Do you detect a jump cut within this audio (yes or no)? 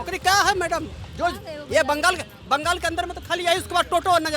no